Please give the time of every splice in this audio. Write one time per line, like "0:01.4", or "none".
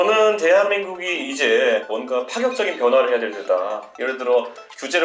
0:01.8
0:03.9

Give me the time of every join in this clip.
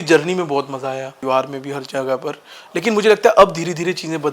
0:01.2

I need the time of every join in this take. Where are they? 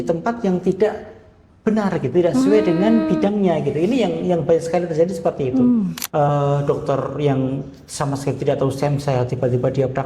0:06.0

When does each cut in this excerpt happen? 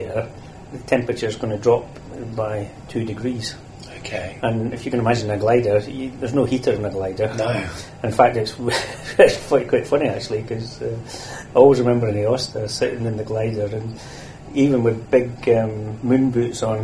none

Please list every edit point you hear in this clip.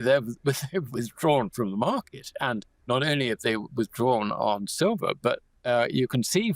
0:02.7
0:05.5

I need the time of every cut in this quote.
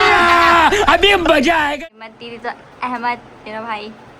0:01.7

